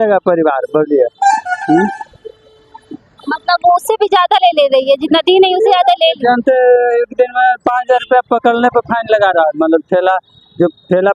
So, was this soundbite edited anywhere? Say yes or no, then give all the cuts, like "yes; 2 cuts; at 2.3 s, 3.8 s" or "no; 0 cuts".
no; 0 cuts